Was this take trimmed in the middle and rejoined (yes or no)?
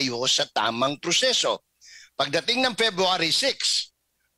no